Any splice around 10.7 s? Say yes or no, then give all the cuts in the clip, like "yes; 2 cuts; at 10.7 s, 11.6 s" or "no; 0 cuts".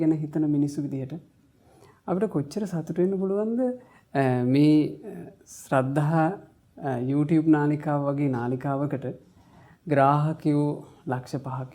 no; 0 cuts